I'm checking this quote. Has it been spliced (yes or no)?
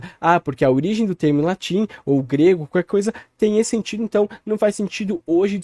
no